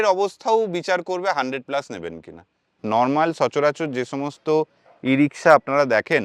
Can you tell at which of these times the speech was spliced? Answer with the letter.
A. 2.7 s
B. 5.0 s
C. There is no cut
A